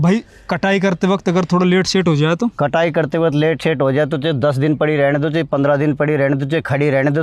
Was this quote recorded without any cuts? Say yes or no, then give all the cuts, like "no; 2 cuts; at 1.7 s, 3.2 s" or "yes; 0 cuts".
yes; 0 cuts